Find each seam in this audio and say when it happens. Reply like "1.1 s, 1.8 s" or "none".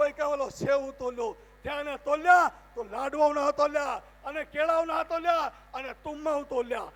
none